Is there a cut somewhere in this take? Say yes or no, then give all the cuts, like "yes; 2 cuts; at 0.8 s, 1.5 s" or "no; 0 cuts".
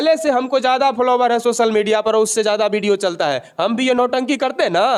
no; 0 cuts